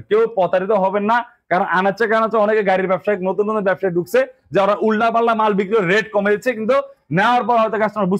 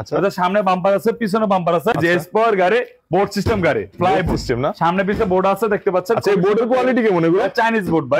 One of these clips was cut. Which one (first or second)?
second